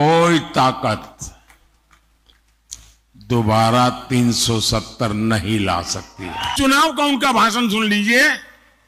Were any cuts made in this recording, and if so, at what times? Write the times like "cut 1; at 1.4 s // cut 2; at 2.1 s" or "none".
cut 1; at 6.5 s